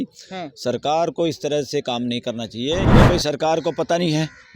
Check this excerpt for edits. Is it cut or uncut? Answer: cut